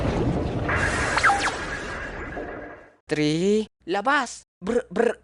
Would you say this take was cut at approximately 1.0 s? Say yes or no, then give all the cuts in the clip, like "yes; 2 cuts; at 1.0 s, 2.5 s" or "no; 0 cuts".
no; 1 cut; at 3.0 s